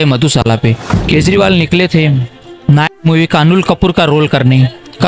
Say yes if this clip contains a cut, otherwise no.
yes